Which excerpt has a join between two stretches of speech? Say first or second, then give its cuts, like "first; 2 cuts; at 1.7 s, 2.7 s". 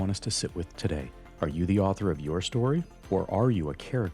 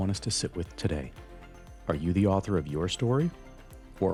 first; 2 cuts; at 1.2 s, 2.9 s